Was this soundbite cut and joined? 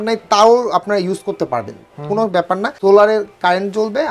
no; 0 cuts

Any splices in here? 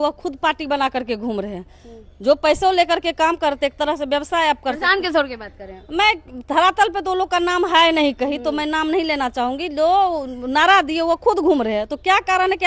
no; 0 cuts

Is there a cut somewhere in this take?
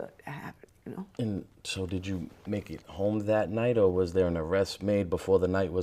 no; 0 cuts

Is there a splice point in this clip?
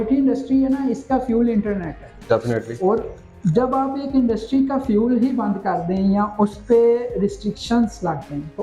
no; 0 cuts

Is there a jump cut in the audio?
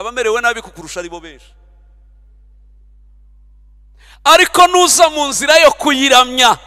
no; 0 cuts

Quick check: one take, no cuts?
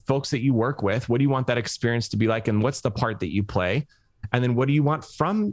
yes; 0 cuts

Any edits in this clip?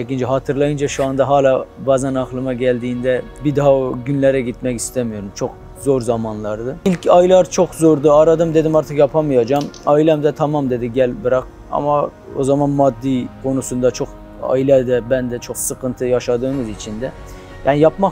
yes; 1 cut; at 6.7 s

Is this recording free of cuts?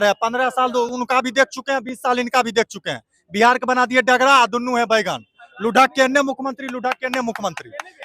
yes; 0 cuts

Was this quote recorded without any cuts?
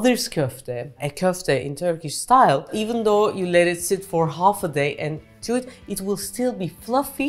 yes; 0 cuts

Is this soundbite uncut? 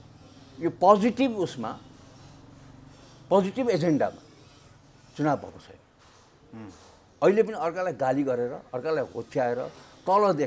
yes; 0 cuts

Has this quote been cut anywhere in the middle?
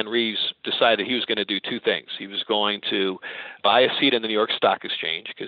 yes; 1 cut; at 3.6 s

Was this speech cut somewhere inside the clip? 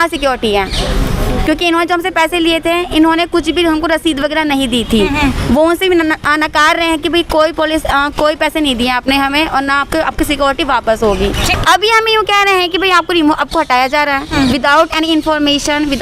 yes; 1 cut; at 11.5 s

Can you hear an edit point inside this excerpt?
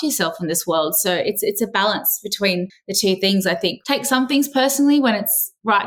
yes; 2 cuts; at 2.8 s, 3.8 s

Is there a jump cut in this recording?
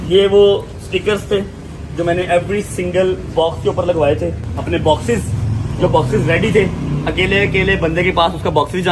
yes; 1 cut; at 4.5 s

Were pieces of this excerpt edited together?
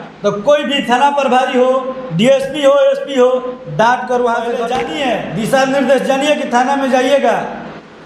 yes; 1 cut; at 4.7 s

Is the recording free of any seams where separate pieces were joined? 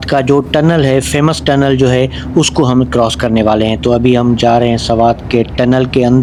yes; 0 cuts

